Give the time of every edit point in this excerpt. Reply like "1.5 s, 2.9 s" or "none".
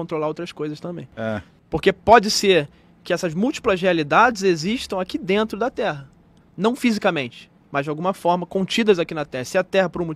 1.1 s

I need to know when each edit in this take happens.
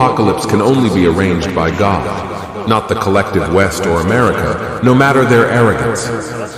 none

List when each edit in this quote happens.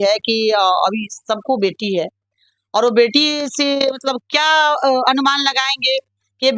none

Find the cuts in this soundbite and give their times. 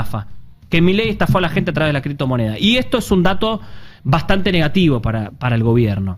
none

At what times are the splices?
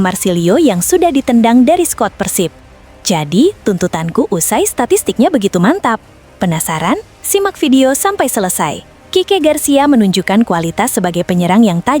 none

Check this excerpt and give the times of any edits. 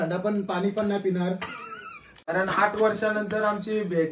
2.1 s

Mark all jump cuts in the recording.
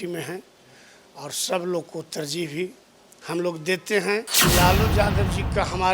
4.3 s

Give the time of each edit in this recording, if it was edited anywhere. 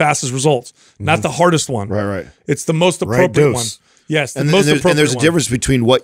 none

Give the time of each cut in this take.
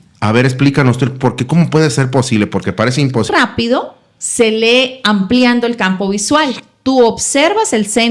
3.3 s

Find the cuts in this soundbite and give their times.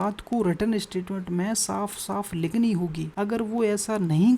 3.0 s

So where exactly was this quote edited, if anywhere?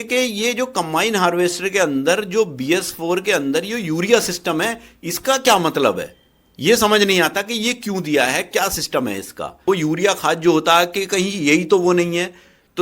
9.6 s

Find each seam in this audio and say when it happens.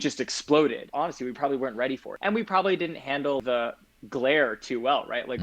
0.8 s, 2.1 s, 3.4 s

